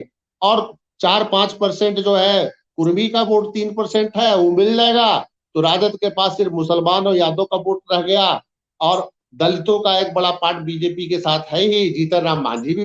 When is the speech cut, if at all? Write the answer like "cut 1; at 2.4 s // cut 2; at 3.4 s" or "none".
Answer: none